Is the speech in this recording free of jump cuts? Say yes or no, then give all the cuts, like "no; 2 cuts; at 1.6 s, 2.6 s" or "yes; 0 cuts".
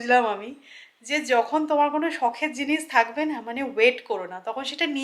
yes; 0 cuts